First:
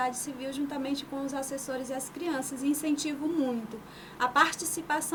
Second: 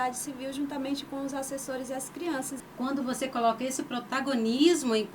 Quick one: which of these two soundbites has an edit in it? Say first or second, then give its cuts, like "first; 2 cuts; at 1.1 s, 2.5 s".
second; 1 cut; at 2.6 s